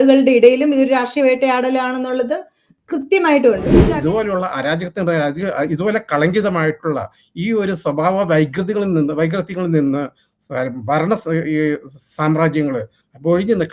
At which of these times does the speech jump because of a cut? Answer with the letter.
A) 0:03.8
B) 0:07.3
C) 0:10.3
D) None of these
A